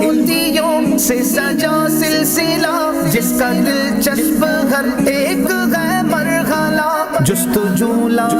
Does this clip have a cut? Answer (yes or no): no